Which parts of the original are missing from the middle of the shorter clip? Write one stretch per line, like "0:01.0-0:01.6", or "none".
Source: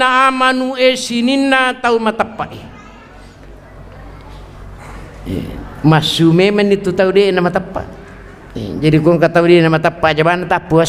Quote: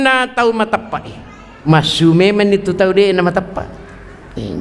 0:03.1-0:05.8